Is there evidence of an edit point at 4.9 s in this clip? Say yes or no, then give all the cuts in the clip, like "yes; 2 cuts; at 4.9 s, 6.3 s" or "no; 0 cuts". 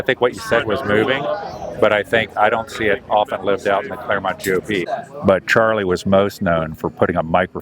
yes; 1 cut; at 4.9 s